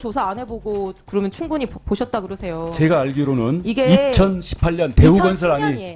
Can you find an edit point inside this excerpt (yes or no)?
no